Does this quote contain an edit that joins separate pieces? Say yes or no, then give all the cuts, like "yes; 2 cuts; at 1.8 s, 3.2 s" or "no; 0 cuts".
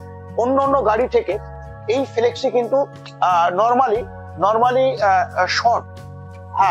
no; 0 cuts